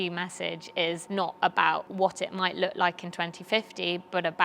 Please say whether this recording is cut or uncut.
cut